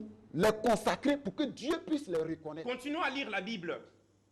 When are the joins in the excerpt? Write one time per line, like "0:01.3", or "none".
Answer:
0:02.5